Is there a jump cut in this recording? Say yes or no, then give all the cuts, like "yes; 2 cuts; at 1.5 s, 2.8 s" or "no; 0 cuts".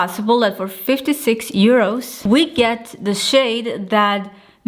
yes; 1 cut; at 2.1 s